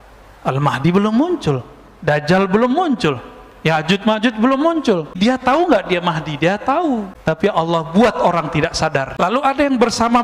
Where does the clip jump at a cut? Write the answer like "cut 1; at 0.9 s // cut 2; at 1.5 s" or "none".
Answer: cut 1; at 5.2 s // cut 2; at 7.2 s // cut 3; at 9.4 s